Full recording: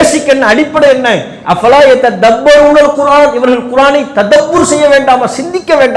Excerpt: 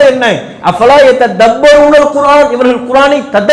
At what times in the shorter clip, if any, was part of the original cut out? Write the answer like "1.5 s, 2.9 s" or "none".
none